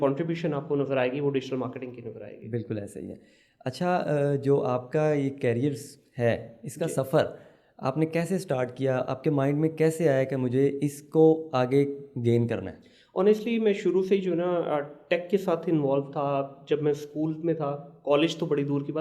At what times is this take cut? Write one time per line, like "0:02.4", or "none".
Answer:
none